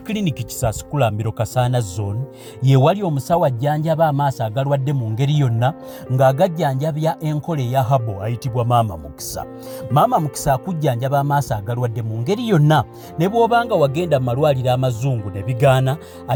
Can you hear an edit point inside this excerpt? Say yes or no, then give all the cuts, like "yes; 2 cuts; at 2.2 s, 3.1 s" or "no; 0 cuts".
no; 0 cuts